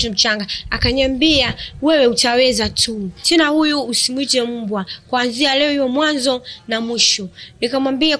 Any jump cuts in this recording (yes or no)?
yes